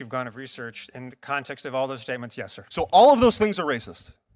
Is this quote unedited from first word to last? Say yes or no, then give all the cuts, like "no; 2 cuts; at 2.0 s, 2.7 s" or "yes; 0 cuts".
no; 1 cut; at 2.6 s